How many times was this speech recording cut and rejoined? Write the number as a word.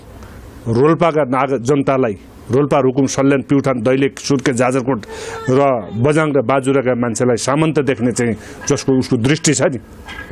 zero